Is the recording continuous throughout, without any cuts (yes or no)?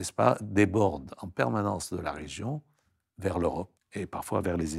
no